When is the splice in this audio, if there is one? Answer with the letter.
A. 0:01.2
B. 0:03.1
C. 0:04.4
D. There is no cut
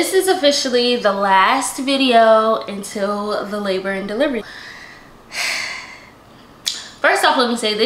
C